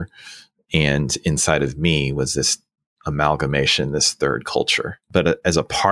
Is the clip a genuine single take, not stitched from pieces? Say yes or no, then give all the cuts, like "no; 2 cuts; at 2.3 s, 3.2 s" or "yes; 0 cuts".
no; 1 cut; at 5.0 s